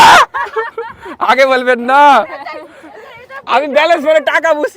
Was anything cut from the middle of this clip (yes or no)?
no